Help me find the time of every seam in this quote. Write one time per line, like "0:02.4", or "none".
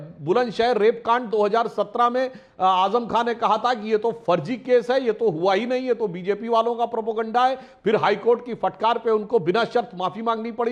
none